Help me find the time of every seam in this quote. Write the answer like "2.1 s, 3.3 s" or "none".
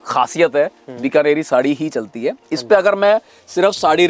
none